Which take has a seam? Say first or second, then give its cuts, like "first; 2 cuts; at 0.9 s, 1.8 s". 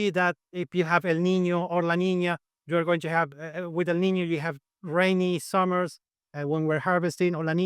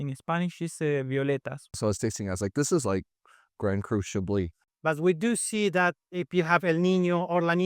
second; 2 cuts; at 1.8 s, 4.6 s